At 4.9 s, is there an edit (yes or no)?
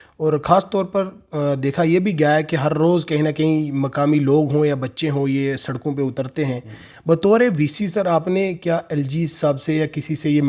no